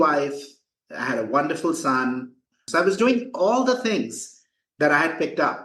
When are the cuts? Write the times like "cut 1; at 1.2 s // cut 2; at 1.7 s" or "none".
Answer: cut 1; at 2.5 s